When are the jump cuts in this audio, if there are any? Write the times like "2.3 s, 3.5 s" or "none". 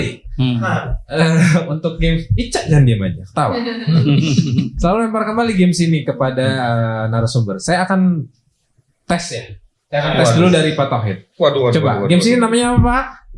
none